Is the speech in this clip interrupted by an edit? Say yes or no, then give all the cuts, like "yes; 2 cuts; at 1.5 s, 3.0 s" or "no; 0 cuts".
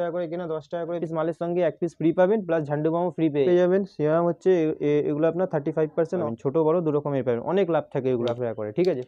yes; 4 cuts; at 1.0 s, 3.5 s, 6.3 s, 8.3 s